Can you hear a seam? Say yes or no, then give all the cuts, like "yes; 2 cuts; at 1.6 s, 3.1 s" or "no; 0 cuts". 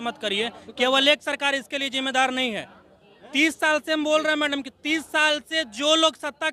no; 0 cuts